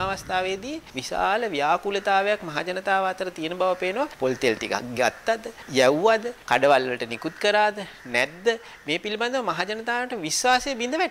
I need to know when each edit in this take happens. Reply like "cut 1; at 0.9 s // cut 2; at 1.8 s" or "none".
cut 1; at 0.9 s // cut 2; at 4.1 s // cut 3; at 5.6 s // cut 4; at 6.3 s